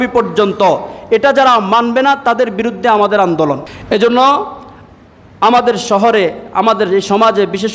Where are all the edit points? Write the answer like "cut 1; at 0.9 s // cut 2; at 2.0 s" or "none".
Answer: cut 1; at 3.7 s